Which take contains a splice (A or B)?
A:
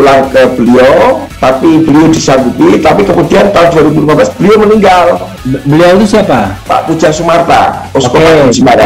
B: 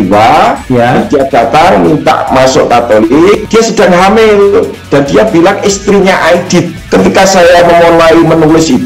B